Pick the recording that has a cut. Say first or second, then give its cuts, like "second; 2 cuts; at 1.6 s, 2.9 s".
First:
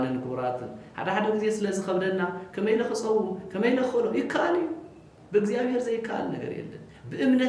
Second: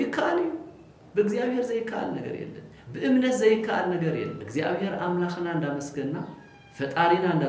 second; 1 cut; at 4.4 s